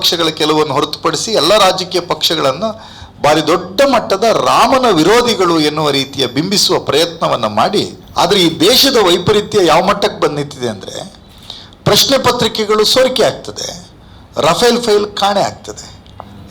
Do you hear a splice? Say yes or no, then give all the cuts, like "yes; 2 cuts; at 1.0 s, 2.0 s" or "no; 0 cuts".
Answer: yes; 1 cut; at 8.0 s